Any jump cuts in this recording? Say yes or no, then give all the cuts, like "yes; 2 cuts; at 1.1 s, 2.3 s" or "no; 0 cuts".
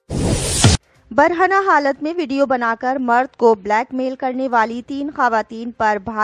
yes; 1 cut; at 0.9 s